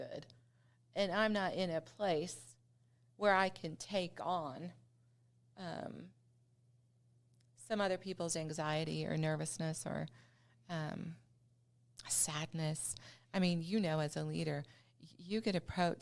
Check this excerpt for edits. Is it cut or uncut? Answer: uncut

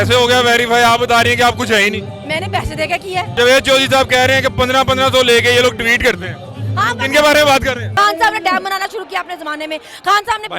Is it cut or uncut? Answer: cut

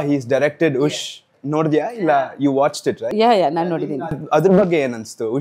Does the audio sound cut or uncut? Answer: cut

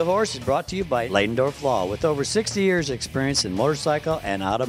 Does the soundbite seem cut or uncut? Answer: uncut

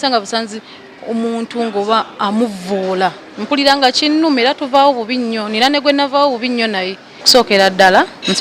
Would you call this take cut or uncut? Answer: cut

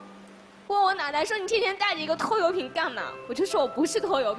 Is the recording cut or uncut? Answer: uncut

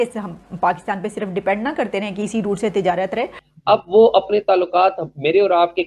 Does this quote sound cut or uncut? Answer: cut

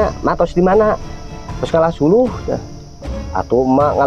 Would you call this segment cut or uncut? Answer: uncut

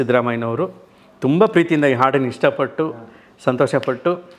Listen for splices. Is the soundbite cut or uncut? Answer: uncut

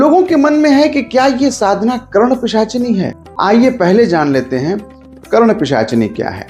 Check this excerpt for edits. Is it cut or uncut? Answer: cut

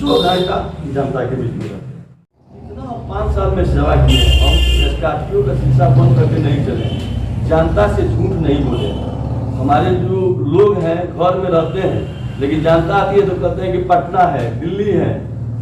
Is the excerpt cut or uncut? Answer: cut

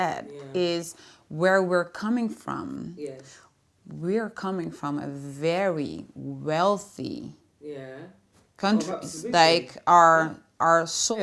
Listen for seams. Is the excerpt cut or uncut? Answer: uncut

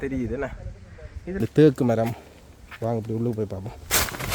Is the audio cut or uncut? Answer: cut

